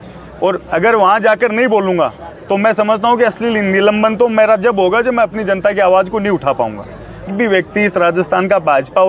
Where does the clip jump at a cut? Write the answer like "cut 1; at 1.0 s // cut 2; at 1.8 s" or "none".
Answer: cut 1; at 7.3 s